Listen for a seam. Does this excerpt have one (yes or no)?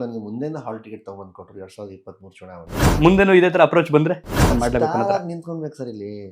yes